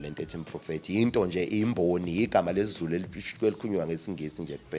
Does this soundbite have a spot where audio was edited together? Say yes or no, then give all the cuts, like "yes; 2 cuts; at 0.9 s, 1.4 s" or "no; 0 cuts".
no; 0 cuts